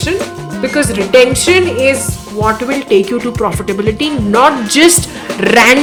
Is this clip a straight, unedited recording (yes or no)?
yes